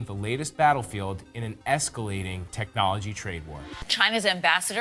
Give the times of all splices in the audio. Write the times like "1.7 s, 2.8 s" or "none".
3.8 s